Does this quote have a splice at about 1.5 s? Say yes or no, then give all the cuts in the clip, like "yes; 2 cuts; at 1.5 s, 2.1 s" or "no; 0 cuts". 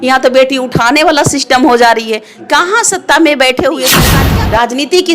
no; 1 cut; at 4.1 s